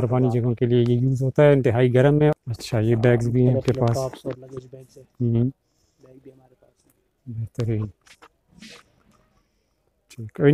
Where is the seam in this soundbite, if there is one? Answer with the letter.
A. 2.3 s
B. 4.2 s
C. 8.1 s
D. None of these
A